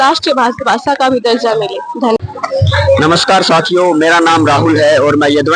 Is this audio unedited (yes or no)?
no